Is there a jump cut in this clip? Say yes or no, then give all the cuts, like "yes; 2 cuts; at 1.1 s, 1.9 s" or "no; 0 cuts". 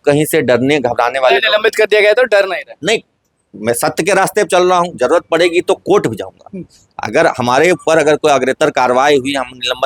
no; 0 cuts